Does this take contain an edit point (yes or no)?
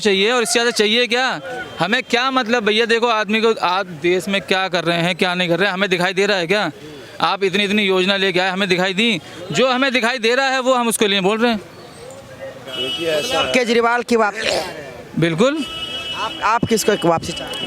no